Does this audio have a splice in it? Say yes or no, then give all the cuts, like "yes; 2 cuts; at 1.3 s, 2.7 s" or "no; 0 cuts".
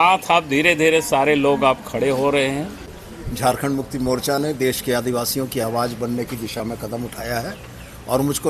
yes; 1 cut; at 3.0 s